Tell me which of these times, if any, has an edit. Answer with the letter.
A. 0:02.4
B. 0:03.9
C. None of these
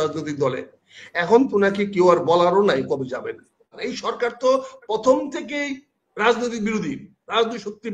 B